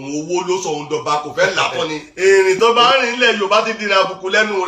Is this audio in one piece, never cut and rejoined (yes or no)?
no